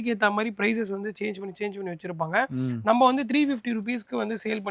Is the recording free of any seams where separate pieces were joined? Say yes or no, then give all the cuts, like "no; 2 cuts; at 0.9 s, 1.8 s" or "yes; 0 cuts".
yes; 0 cuts